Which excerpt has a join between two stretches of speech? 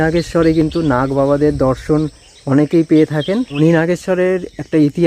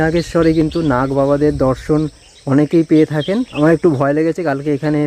first; 1 cut; at 3.6 s

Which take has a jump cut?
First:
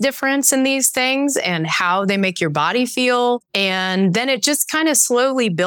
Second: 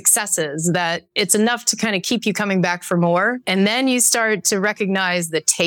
first; 1 cut; at 3.4 s

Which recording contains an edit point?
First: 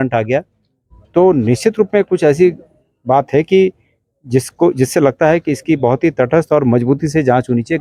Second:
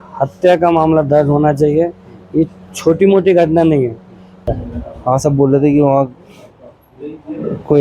second; 1 cut; at 4.5 s

